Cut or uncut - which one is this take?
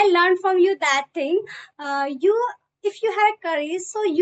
uncut